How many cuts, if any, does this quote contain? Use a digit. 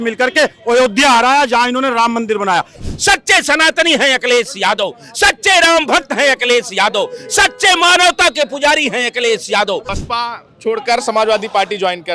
2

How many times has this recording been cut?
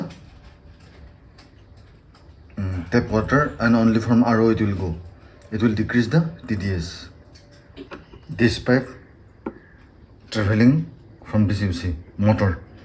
1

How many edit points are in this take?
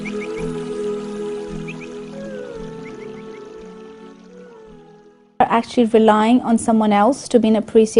0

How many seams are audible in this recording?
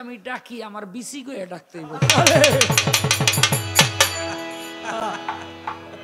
0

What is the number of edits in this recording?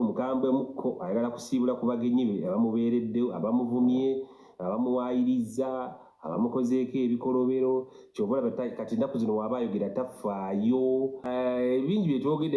1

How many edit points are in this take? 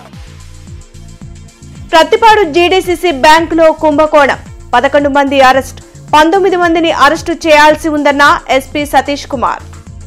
0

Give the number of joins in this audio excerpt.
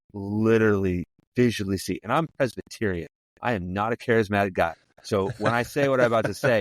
1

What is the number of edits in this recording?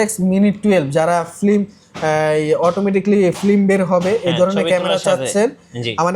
0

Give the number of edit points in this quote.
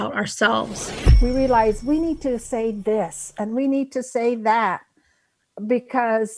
1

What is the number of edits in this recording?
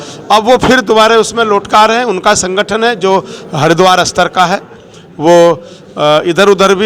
0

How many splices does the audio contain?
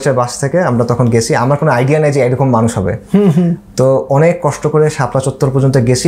0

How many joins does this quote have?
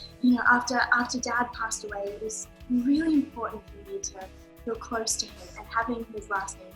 0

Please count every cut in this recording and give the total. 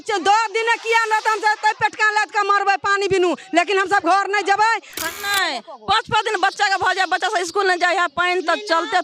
1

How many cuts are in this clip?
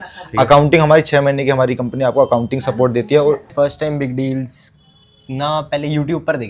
1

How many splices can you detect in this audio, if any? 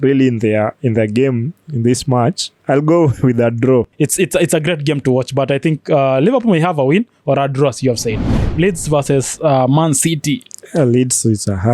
3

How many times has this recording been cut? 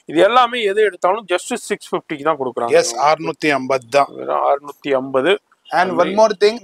0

